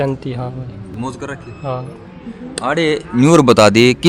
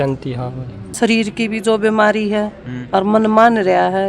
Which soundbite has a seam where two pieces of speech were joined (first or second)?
second